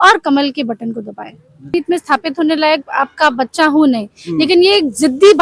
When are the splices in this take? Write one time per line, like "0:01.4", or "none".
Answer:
0:01.7